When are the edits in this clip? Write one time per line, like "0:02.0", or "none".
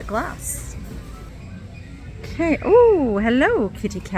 0:01.3